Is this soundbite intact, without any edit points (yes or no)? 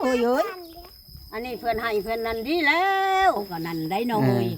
no